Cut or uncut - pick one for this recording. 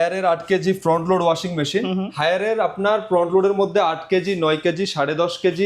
uncut